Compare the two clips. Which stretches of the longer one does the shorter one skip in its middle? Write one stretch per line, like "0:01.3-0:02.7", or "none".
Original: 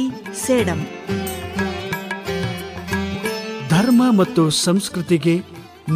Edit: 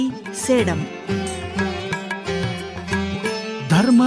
none